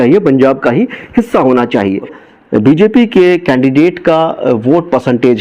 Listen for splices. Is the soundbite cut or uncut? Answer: cut